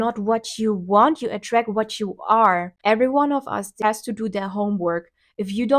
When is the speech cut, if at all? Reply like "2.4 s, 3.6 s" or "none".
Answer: 2.7 s